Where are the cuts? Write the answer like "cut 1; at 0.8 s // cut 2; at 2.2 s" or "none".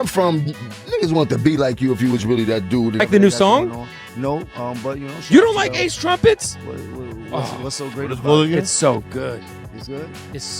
cut 1; at 2.9 s